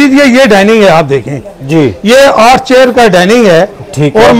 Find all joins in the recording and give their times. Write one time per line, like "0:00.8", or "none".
none